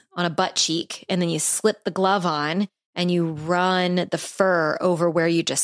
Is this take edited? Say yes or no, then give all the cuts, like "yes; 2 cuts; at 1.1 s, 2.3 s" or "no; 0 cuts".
no; 0 cuts